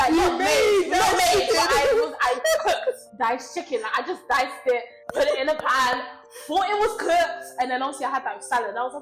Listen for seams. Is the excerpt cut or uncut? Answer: cut